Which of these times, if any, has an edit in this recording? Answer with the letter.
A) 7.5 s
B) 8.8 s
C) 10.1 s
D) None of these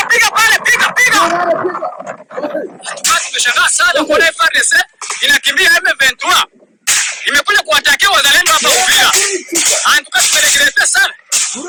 D